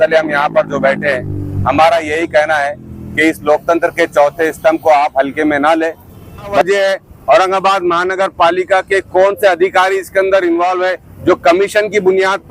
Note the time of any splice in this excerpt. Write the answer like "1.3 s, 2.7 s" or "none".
6.6 s

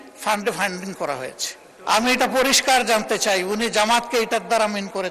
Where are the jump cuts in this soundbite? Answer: 1.7 s

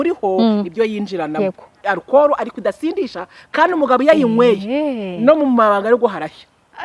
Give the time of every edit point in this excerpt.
1.8 s

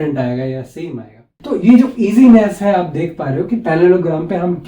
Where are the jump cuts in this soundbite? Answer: 1.3 s

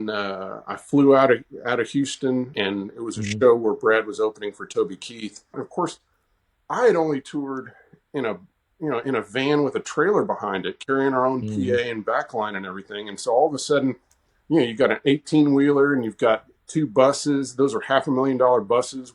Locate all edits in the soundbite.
2.5 s, 5.6 s

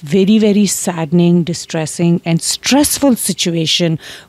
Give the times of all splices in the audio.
none

